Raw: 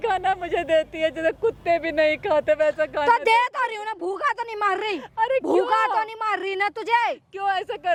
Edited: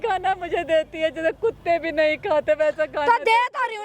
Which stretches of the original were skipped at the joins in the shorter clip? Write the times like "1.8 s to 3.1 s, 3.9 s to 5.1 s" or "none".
none